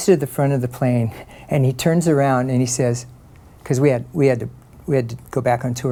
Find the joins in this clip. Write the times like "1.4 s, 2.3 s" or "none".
none